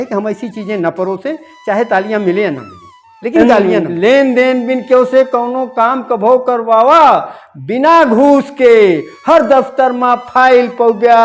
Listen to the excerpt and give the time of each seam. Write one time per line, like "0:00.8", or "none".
0:03.8

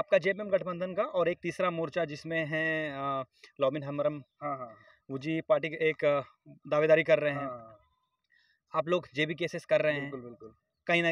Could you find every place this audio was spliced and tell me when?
none

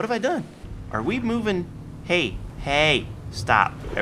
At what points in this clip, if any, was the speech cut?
0:02.5

